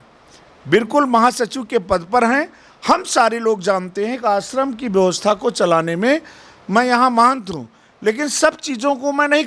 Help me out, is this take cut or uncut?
uncut